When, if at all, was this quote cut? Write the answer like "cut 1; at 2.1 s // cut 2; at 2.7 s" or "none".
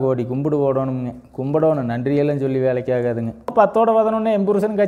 cut 1; at 3.5 s